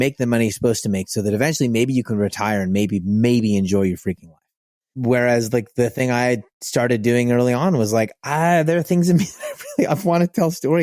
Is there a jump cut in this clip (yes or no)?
yes